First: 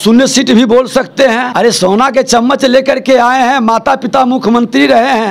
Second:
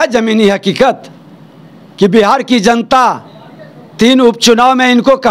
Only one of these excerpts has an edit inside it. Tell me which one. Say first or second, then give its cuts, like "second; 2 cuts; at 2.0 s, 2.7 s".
first; 1 cut; at 1.5 s